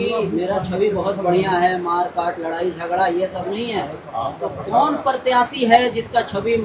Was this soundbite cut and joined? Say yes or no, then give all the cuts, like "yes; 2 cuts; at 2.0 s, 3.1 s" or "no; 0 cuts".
no; 0 cuts